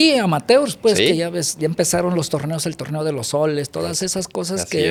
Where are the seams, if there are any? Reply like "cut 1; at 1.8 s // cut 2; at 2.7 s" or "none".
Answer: none